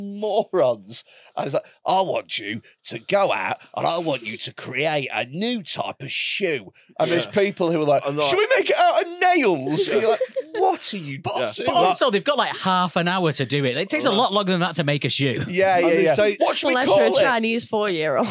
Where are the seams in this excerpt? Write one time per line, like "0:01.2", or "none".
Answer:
none